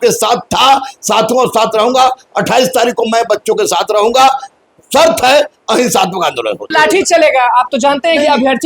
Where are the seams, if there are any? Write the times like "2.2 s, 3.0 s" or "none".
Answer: 6.7 s